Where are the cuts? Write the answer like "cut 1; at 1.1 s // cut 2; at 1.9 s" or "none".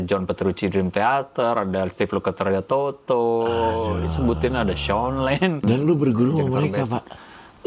cut 1; at 5.6 s